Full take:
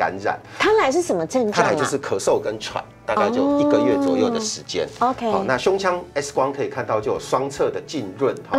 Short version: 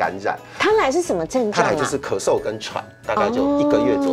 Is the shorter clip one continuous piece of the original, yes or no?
yes